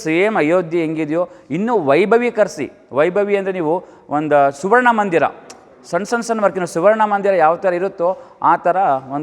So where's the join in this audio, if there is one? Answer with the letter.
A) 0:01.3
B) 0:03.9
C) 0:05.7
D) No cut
D